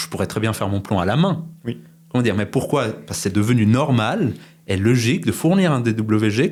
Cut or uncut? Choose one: uncut